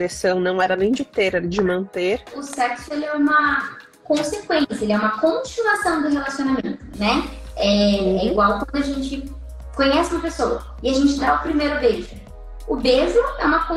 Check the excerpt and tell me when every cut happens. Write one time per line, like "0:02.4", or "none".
0:02.4